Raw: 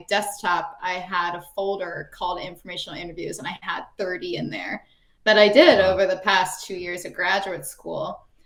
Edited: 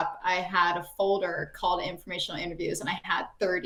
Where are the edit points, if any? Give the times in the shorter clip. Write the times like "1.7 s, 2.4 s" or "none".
none

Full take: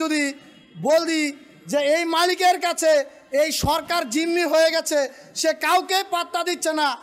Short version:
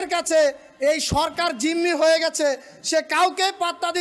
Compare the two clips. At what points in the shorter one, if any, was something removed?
none

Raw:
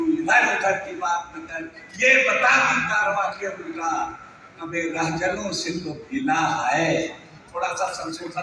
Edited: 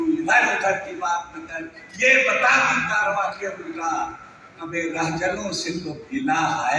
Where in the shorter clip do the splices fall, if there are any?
none

